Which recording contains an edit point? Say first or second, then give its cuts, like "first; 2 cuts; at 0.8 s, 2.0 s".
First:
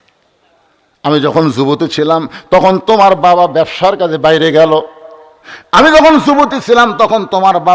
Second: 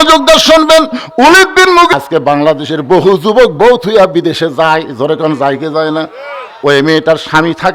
second; 2 cuts; at 1.9 s, 6.5 s